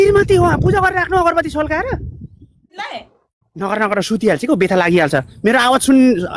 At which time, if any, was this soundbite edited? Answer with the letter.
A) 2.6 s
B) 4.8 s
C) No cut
A